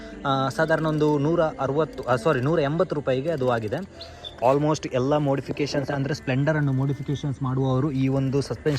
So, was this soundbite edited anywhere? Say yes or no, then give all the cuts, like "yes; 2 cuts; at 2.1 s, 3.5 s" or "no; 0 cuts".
yes; 1 cut; at 4.4 s